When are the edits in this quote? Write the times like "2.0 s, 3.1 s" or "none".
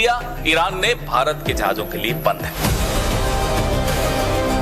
none